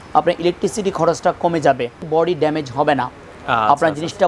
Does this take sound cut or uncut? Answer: cut